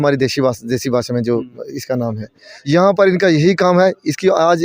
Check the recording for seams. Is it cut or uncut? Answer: cut